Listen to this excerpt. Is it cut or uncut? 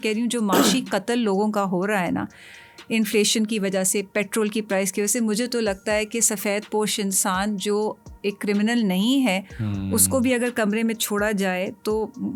uncut